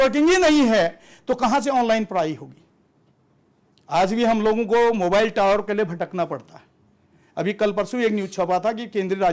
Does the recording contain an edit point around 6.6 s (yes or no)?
no